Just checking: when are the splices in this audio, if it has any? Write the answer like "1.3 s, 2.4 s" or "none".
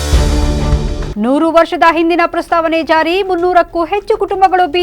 1.1 s